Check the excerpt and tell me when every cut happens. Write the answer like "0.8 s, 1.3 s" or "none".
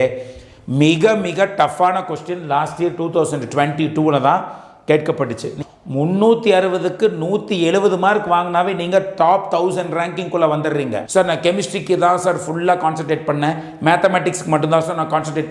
5.5 s, 11.0 s